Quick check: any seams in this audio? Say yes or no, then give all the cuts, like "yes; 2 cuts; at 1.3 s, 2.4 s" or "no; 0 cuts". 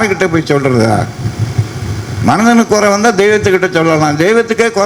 no; 0 cuts